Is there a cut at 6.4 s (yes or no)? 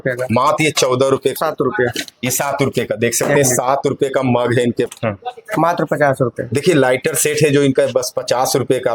no